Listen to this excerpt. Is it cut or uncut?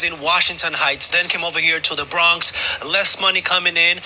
cut